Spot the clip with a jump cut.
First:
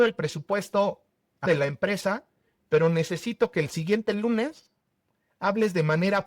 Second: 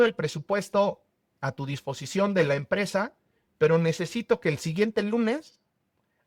first; 1 cut; at 1.4 s

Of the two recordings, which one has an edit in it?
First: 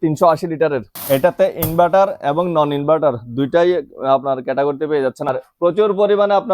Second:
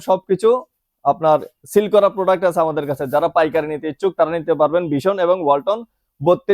first; 2 cuts; at 0.9 s, 5.3 s

